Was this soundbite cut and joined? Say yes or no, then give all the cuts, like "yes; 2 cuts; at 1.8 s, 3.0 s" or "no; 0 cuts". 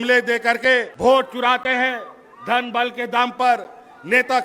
yes; 1 cut; at 0.9 s